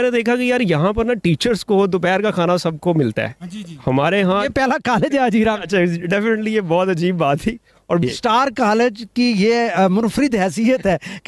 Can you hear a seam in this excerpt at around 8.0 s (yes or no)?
yes